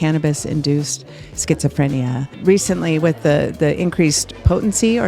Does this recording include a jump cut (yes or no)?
yes